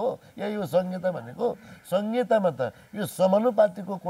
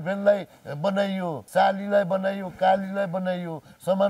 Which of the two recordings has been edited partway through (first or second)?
second